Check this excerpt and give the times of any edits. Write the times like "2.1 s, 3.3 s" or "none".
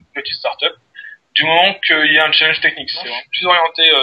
3.0 s